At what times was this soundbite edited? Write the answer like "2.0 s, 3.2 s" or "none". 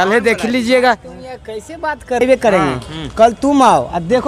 2.2 s